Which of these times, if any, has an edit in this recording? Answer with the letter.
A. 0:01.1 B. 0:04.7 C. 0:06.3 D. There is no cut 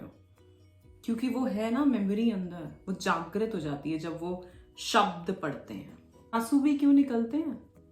C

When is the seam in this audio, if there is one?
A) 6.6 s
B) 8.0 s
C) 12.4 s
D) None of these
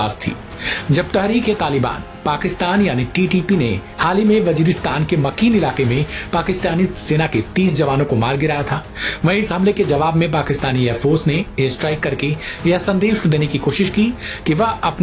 D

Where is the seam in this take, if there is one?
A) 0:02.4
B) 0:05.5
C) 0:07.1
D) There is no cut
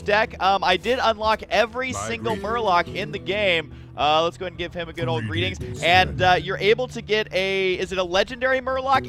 D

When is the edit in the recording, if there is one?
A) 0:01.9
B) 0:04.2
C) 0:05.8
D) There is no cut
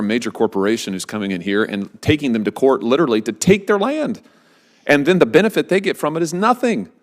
A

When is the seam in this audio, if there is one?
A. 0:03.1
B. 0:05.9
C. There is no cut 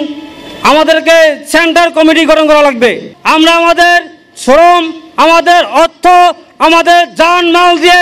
A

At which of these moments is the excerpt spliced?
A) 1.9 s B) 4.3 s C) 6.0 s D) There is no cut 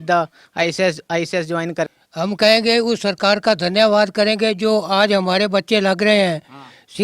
A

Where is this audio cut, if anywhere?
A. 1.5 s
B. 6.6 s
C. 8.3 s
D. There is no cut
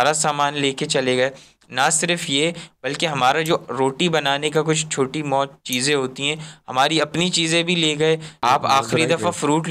C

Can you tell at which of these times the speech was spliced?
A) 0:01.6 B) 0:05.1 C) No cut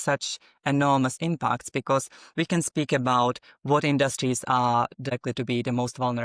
B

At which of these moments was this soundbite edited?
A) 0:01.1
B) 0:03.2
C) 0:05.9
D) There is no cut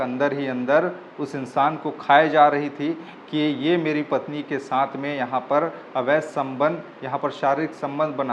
D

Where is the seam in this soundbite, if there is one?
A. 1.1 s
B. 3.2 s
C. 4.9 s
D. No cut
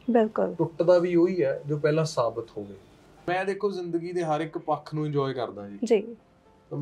B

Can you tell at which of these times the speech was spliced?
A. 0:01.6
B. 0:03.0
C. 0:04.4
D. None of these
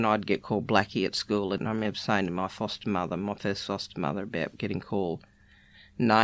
A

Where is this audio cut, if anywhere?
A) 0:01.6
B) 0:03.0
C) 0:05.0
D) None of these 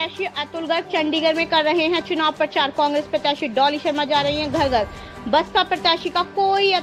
D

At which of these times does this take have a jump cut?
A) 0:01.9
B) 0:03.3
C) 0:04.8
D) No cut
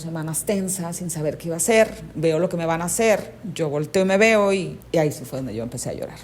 C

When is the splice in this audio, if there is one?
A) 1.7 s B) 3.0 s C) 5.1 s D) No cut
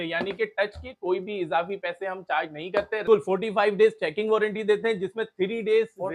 B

